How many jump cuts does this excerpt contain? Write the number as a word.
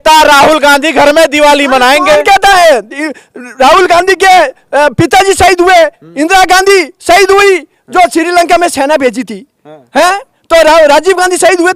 zero